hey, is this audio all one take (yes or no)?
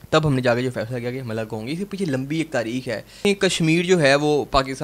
no